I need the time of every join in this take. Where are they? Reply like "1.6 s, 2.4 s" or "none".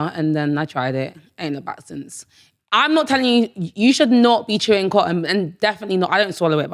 2.5 s